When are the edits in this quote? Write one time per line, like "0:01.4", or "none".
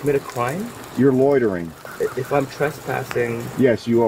0:01.8